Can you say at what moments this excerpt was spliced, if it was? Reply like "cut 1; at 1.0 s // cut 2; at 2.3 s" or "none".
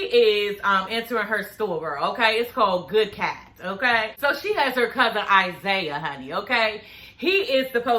cut 1; at 4.2 s